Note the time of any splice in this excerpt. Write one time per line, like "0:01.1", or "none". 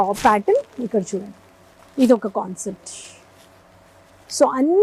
none